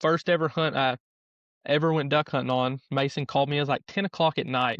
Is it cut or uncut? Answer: uncut